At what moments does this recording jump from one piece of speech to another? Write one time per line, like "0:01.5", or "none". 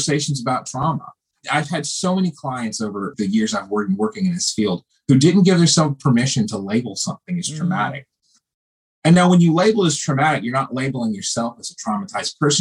0:01.4
0:03.1